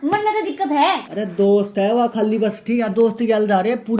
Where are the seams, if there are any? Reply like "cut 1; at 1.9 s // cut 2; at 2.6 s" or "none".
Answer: cut 1; at 1.1 s